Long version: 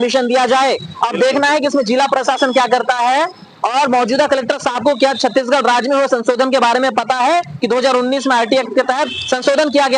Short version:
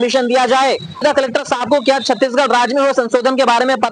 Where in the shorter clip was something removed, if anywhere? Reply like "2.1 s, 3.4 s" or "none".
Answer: 1.0 s